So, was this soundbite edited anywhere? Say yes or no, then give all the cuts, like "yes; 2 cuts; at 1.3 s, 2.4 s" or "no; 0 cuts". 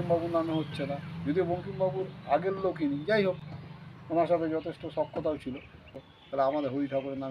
yes; 1 cut; at 6.0 s